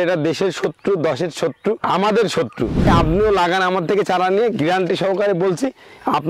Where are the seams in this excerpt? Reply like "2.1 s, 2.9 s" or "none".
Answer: 1.8 s, 2.9 s